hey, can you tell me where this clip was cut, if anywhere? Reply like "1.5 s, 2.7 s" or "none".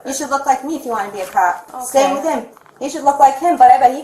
1.7 s